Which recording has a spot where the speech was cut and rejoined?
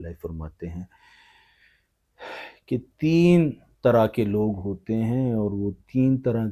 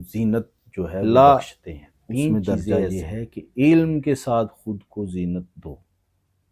second; 1 cut; at 1.0 s

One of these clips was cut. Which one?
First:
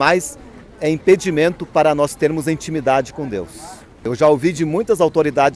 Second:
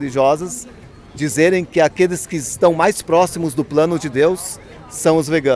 first; 1 cut; at 4.0 s

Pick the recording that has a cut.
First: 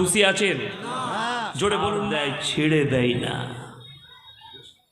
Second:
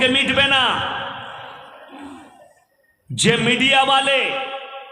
first; 1 cut; at 2.1 s

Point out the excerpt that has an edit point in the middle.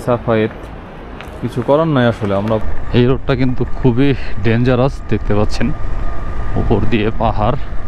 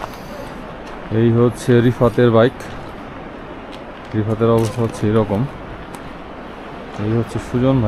first; 1 cut; at 2.6 s

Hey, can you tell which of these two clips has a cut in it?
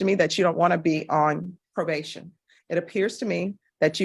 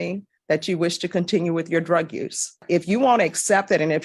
second; 1 cut; at 2.6 s

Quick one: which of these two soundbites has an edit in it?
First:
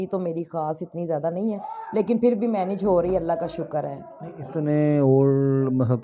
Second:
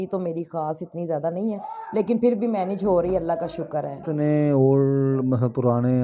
second; 1 cut; at 4.0 s

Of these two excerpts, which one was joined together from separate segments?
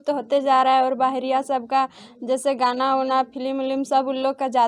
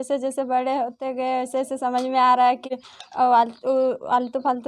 second; 1 cut; at 2.8 s

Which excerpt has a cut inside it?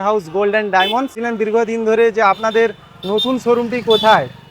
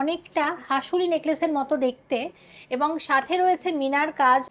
first; 1 cut; at 1.2 s

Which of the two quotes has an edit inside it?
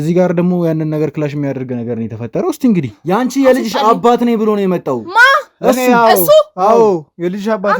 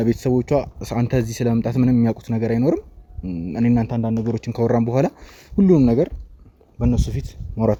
first; 1 cut; at 2.9 s

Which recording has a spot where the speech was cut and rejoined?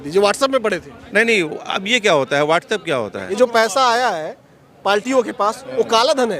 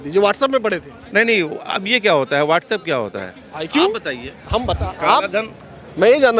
first; 1 cut; at 3.4 s

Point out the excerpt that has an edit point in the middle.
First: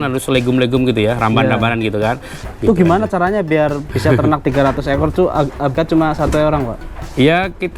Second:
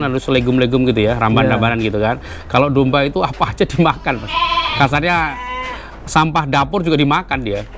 first; 3 cuts; at 2.3 s, 4.4 s, 5.7 s

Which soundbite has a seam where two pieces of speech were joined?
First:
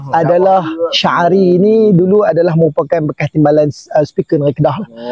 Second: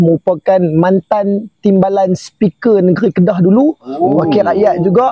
first; 1 cut; at 0.9 s

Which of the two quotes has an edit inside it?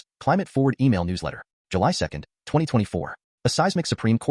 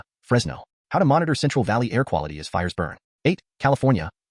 second; 1 cut; at 3.0 s

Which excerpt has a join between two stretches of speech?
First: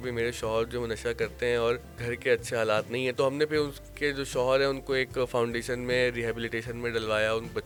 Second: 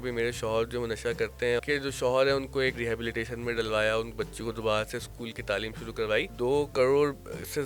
second; 3 cuts; at 1.6 s, 2.8 s, 6.3 s

